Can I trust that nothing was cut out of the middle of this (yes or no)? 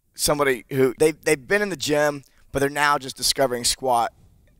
no